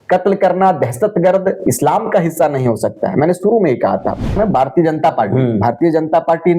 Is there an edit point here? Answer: yes; 1 cut; at 4.4 s

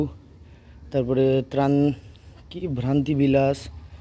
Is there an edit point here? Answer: no; 0 cuts

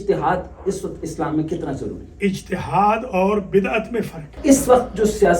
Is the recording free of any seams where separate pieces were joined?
no; 1 cut; at 4.4 s

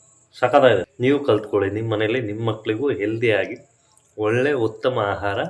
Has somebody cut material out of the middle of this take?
yes; 1 cut; at 0.9 s

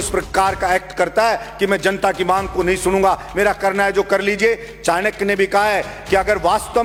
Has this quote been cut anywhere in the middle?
no; 0 cuts

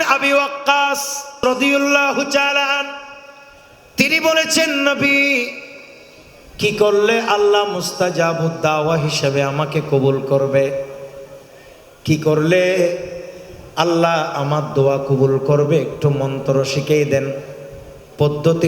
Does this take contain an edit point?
yes; 1 cut; at 1.3 s

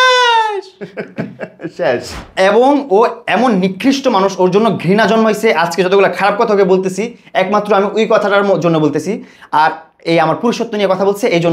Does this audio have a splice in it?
yes; 1 cut; at 2.2 s

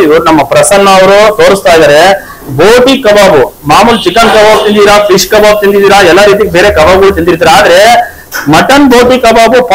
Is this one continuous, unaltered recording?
yes; 0 cuts

